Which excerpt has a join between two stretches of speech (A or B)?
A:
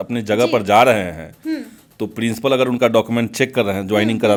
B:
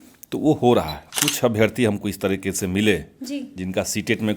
B